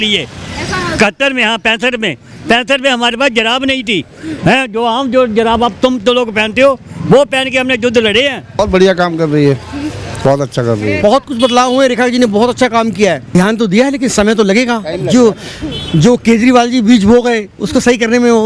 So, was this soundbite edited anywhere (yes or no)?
yes